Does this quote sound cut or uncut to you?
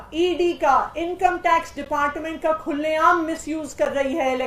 uncut